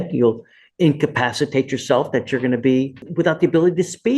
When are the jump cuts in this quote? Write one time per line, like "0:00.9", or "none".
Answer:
0:03.0